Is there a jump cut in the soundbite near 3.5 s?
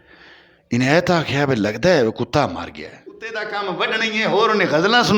yes; 1 cut; at 3.5 s

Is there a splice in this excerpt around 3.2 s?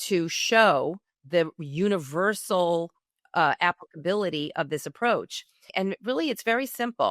no; 1 cut; at 5.6 s

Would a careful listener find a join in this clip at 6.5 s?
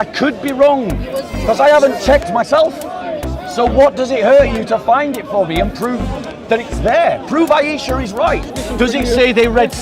no; 1 cut; at 8.5 s

